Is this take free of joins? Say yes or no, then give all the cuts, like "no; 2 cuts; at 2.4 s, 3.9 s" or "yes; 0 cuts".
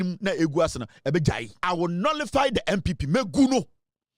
no; 1 cut; at 1.5 s